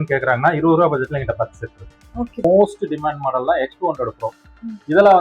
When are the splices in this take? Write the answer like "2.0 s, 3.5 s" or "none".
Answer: 2.4 s